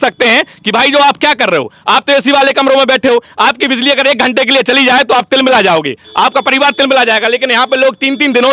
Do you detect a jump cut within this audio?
no; 0 cuts

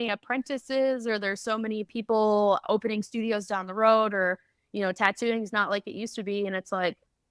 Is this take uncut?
yes; 0 cuts

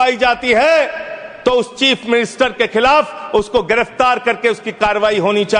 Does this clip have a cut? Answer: no; 0 cuts

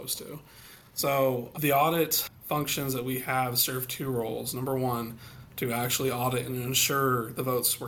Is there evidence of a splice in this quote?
yes; 1 cut; at 2.3 s

